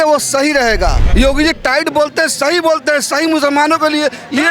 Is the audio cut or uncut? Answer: cut